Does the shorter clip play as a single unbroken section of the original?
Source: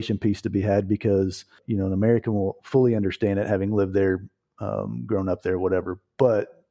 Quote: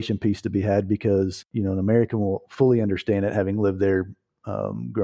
no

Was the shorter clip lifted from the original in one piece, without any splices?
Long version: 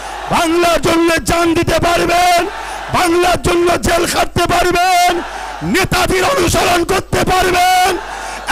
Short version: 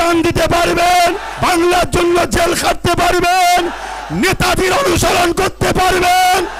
no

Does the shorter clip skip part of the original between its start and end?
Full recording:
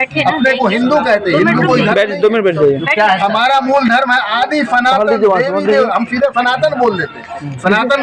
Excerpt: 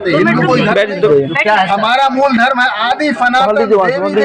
yes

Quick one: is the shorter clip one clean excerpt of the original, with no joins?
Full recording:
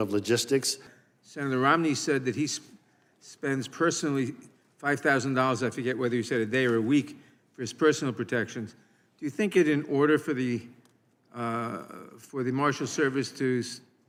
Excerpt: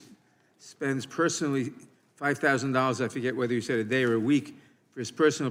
yes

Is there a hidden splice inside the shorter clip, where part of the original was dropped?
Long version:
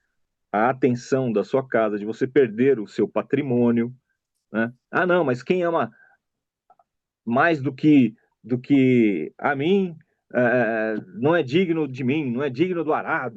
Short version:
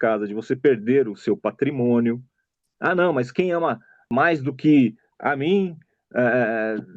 yes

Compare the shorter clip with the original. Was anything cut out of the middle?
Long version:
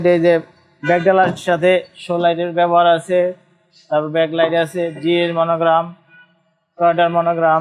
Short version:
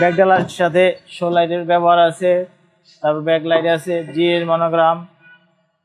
no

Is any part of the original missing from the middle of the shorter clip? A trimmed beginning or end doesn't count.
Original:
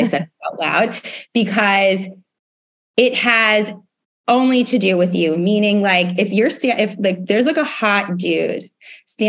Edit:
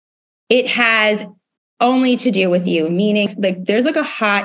yes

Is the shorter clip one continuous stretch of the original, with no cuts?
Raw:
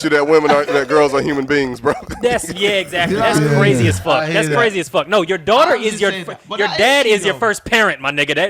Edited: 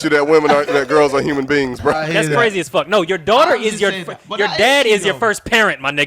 no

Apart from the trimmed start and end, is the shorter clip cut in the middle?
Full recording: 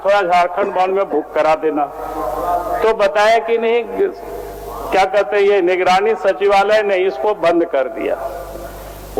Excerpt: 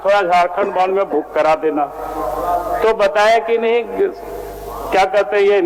no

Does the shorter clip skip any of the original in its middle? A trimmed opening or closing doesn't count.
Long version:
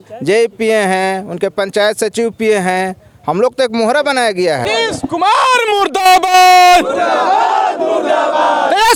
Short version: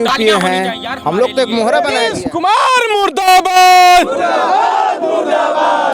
yes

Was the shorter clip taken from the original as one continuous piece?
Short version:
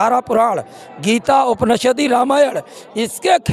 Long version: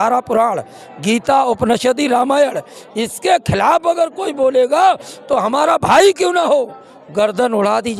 yes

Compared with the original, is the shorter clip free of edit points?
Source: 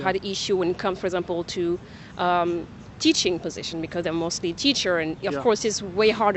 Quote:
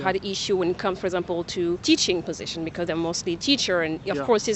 no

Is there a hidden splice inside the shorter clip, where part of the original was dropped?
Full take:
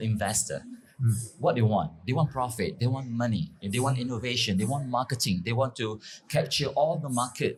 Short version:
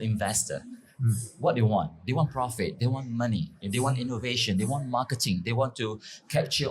no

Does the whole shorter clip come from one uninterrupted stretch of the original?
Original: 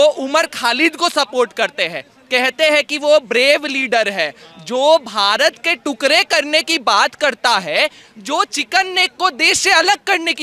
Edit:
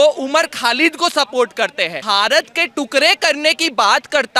no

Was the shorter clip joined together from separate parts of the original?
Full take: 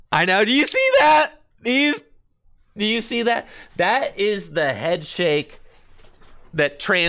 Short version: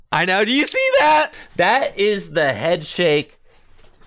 yes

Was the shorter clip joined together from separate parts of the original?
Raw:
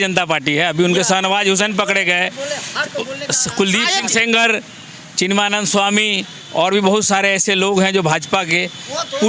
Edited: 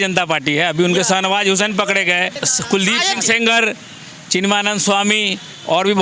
yes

